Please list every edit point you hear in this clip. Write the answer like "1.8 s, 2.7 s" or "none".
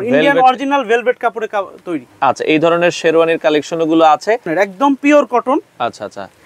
4.5 s